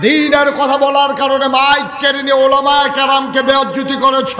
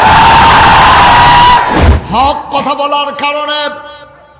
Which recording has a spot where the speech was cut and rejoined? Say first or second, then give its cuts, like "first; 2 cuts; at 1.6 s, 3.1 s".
second; 1 cut; at 1.9 s